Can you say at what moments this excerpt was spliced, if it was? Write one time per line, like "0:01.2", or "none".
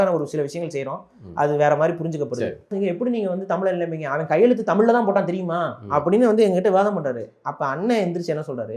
0:02.7